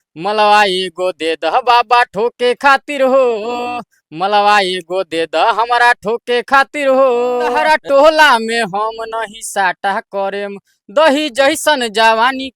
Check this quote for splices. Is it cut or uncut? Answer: cut